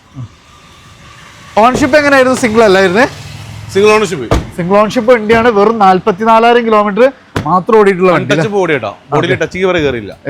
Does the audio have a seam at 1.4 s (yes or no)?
no